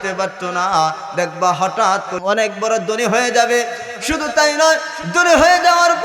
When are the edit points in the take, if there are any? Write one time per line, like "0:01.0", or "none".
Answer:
0:02.1